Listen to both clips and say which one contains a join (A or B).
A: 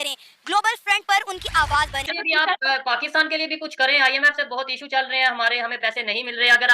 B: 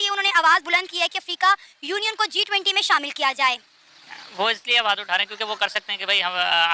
A